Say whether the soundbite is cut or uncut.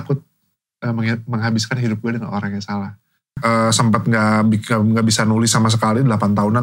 cut